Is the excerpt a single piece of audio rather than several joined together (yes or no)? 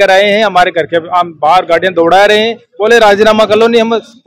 yes